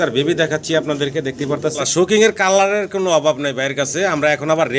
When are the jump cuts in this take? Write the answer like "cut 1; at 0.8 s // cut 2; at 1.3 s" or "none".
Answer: cut 1; at 1.8 s